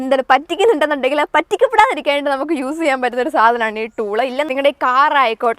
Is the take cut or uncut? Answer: cut